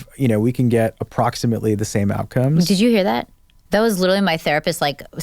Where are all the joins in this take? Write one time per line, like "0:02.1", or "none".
0:02.6